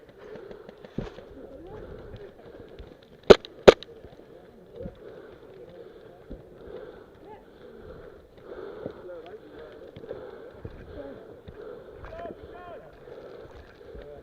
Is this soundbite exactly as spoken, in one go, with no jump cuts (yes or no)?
no